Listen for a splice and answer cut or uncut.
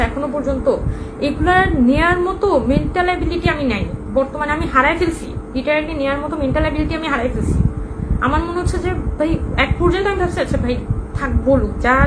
uncut